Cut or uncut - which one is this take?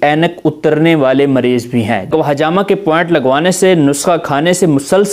cut